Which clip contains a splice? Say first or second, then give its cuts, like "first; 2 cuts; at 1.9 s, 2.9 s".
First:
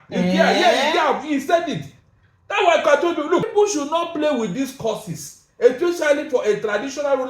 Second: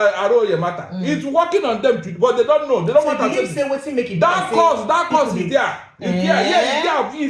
first; 1 cut; at 3.5 s